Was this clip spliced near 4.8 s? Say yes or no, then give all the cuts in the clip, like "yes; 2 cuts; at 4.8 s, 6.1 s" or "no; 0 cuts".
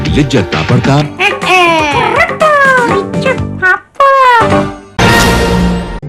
yes; 1 cut; at 4.8 s